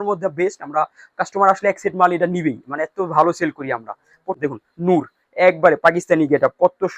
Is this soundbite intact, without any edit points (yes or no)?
no